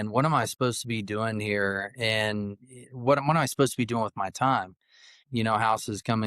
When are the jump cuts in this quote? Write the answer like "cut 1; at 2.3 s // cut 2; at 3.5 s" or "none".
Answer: cut 1; at 5.2 s